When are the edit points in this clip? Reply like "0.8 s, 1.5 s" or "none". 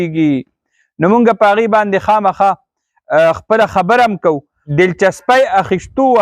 4.5 s